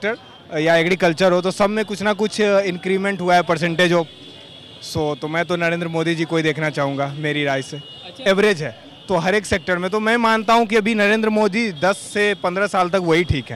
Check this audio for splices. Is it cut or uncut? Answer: cut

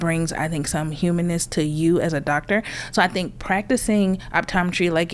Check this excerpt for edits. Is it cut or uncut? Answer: uncut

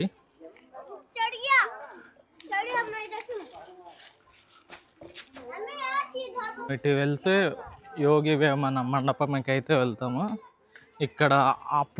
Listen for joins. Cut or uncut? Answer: cut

